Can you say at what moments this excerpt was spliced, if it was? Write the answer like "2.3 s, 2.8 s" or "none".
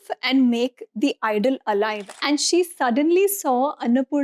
2.1 s